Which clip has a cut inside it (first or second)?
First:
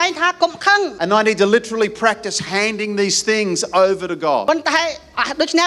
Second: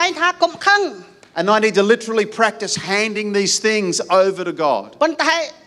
first